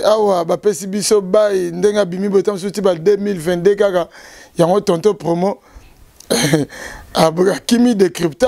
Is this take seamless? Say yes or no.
yes